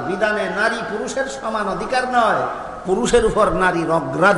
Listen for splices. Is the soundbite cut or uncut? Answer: uncut